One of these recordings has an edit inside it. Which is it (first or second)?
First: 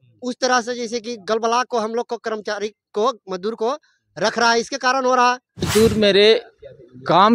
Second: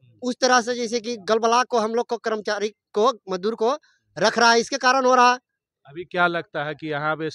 first